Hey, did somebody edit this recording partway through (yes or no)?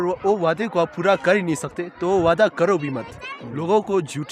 no